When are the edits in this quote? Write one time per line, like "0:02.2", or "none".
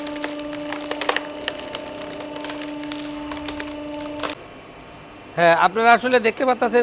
0:04.4